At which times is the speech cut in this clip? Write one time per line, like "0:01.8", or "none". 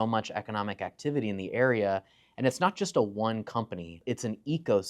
0:04.0